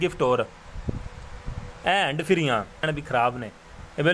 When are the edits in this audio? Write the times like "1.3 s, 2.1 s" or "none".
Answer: 2.8 s